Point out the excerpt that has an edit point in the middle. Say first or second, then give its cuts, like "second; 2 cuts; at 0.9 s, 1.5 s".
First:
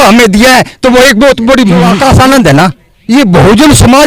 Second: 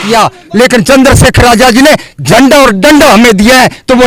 first; 1 cut; at 1.9 s